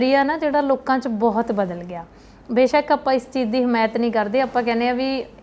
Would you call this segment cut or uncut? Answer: uncut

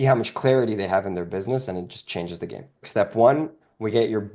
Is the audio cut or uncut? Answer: cut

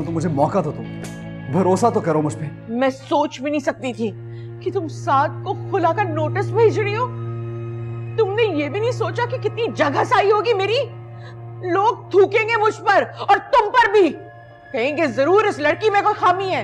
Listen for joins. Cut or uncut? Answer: cut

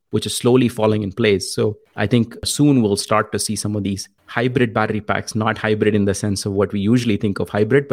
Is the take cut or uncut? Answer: cut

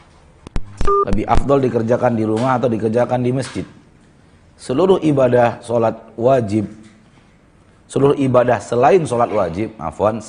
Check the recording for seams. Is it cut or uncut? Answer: uncut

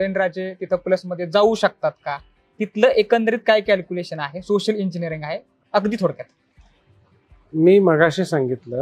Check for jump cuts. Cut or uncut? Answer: uncut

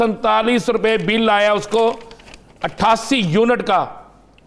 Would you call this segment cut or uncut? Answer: uncut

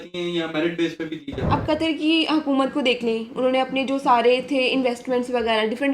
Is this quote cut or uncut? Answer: cut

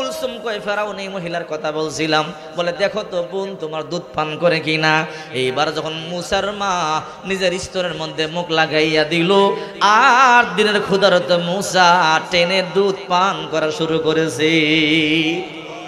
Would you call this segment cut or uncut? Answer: uncut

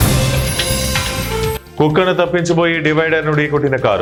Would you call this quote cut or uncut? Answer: uncut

